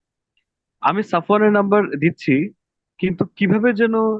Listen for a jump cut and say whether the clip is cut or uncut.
uncut